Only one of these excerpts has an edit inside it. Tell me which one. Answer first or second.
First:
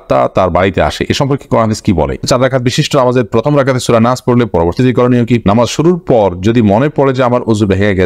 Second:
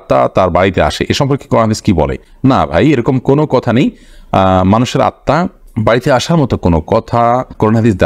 first